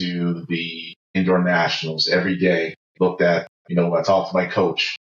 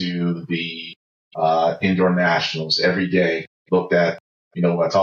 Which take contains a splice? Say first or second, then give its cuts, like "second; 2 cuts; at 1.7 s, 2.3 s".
first; 2 cuts; at 1.2 s, 3.6 s